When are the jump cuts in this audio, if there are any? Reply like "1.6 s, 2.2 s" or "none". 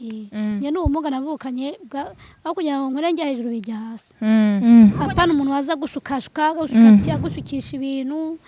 4.6 s